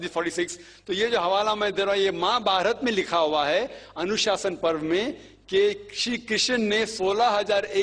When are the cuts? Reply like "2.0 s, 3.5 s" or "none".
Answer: none